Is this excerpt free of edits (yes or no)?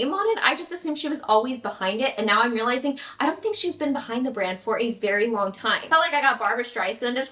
no